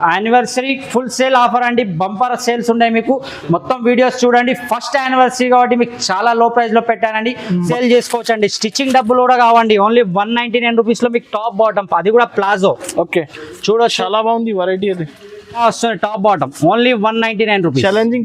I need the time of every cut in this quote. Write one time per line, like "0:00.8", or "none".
0:07.7
0:15.6